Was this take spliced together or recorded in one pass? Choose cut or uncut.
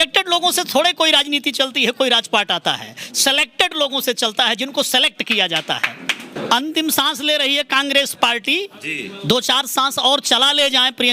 cut